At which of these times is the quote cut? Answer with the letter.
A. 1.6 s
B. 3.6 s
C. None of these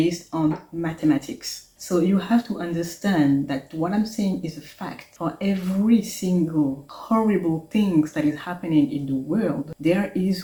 C